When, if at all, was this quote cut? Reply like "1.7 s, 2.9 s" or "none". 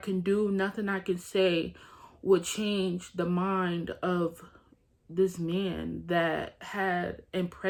none

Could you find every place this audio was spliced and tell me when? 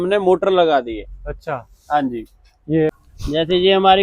3.0 s

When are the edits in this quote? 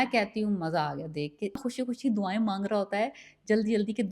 1.6 s

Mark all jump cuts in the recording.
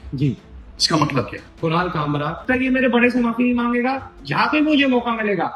1.4 s, 2.4 s

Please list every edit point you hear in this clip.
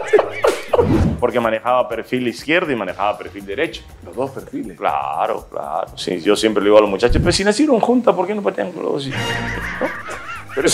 1.0 s

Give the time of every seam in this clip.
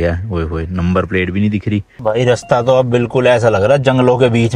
1.9 s

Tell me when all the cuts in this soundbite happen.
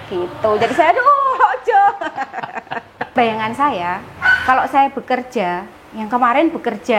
3.1 s

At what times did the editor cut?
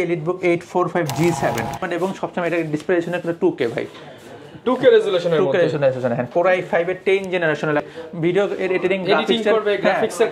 1.9 s, 7.9 s

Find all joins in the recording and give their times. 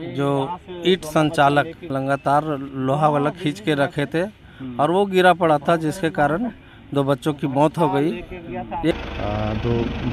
1.8 s, 8.9 s

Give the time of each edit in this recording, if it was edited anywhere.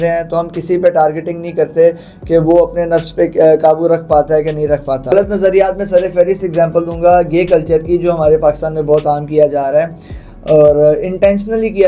5.1 s

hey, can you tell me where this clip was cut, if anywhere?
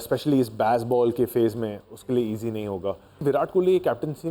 3.2 s

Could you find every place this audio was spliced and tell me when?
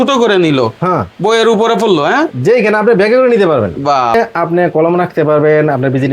4.1 s

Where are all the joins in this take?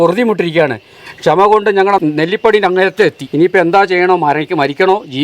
2.0 s, 3.2 s

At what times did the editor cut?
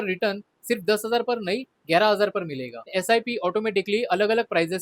2.8 s

